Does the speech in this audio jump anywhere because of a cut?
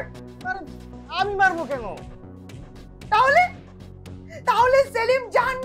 no; 0 cuts

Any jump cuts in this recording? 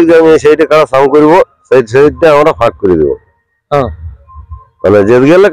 no; 0 cuts

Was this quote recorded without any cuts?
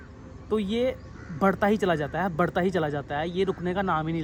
yes; 0 cuts

